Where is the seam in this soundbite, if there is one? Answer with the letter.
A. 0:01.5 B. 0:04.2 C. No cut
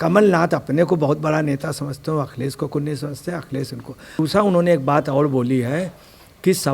B